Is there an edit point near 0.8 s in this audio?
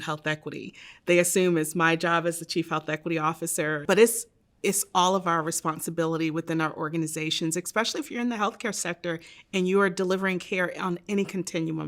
no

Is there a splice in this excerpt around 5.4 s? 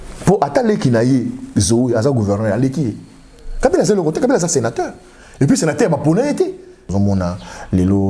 no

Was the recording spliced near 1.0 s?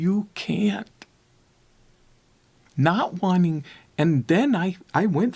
no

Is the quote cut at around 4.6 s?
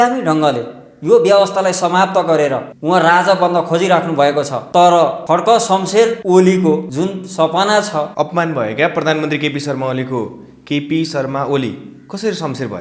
yes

